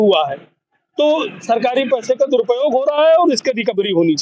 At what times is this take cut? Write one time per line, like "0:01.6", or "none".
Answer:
none